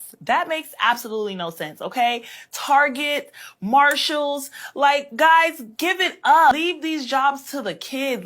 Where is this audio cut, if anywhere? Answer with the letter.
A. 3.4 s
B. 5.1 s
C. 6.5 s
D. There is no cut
C